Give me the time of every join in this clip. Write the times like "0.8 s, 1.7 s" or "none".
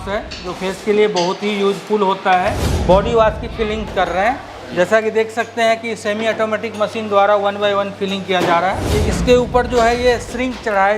2.7 s, 8.8 s